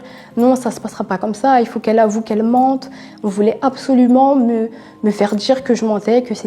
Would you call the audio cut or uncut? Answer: uncut